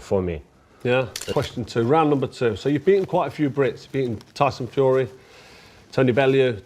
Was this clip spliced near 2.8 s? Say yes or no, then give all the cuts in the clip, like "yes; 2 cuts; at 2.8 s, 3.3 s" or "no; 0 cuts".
no; 1 cut; at 1.3 s